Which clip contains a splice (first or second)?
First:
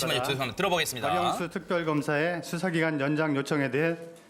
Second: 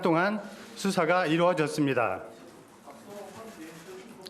second